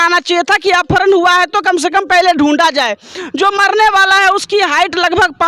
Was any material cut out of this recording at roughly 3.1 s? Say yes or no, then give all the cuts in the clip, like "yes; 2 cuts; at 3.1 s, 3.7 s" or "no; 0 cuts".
yes; 1 cut; at 3.1 s